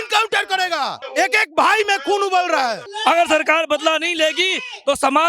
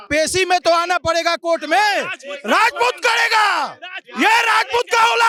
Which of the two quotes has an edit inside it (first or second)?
first